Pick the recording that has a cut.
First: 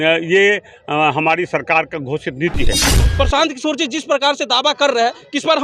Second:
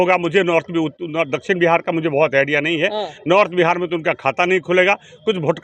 first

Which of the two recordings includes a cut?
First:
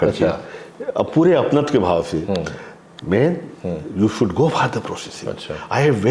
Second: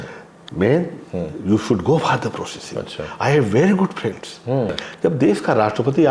second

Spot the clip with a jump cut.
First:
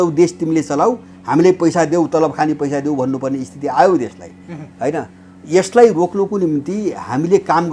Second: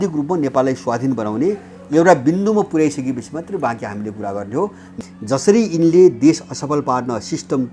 second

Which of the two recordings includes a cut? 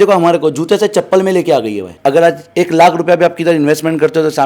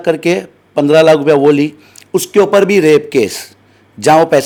first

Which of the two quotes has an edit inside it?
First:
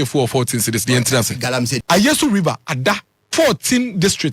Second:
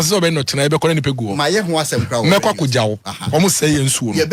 first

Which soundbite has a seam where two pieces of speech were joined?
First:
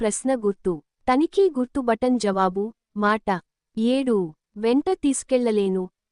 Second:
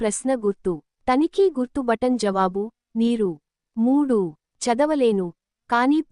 second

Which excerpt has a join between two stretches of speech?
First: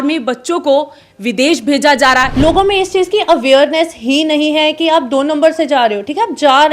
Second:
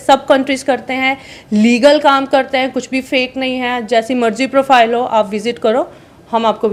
first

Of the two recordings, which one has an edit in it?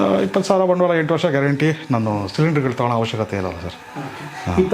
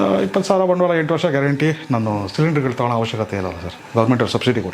second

